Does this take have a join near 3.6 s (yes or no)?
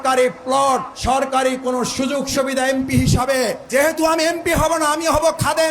yes